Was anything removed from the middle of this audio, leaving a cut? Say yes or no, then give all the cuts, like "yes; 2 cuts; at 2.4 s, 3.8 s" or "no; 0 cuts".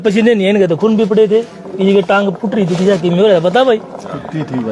no; 0 cuts